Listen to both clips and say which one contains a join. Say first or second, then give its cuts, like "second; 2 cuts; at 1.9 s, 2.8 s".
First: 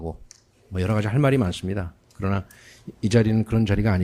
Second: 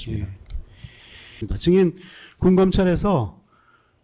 second; 1 cut; at 1.5 s